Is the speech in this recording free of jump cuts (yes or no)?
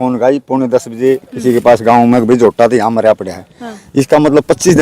yes